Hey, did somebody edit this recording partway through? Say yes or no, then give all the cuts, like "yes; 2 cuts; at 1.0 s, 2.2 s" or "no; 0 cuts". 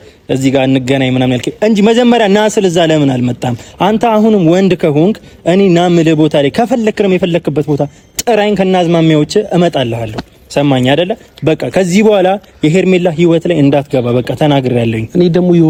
no; 0 cuts